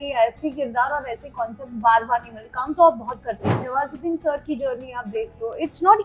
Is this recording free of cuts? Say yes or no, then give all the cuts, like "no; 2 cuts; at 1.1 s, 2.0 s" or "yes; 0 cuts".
no; 1 cut; at 3.7 s